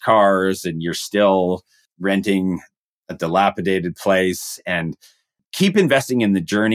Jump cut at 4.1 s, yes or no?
no